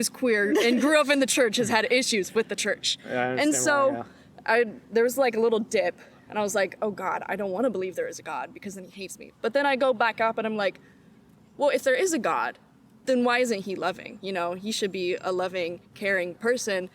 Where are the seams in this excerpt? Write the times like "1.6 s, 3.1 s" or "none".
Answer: none